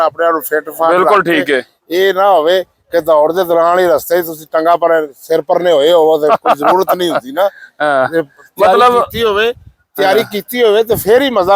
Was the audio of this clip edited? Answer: no; 0 cuts

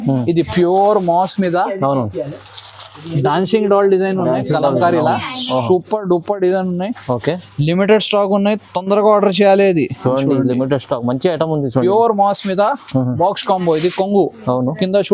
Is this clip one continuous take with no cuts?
yes; 0 cuts

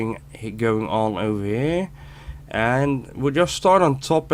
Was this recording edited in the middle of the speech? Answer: no; 0 cuts

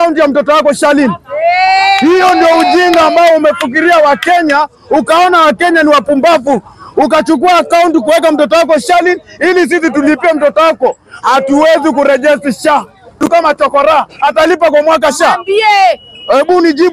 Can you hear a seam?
yes; 1 cut; at 13.2 s

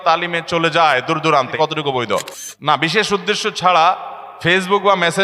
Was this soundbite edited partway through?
yes; 2 cuts; at 1.5 s, 2.4 s

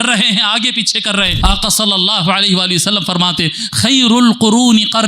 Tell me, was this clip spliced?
yes; 1 cut; at 1.3 s

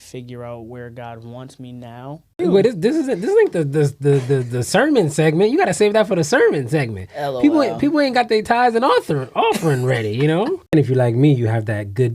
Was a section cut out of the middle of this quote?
yes; 2 cuts; at 2.3 s, 10.7 s

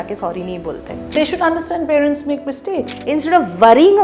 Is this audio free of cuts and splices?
no; 2 cuts; at 1.1 s, 2.9 s

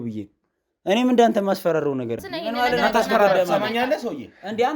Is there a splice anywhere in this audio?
yes; 1 cut; at 2.3 s

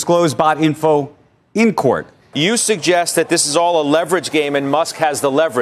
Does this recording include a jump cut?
yes; 1 cut; at 2.2 s

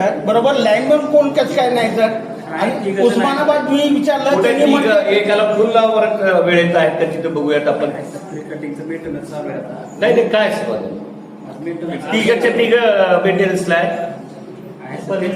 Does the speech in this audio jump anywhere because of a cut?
no; 0 cuts

